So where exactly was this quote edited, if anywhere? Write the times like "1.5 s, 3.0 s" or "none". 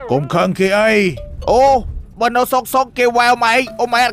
none